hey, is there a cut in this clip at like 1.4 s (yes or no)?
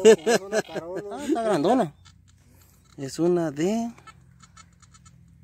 yes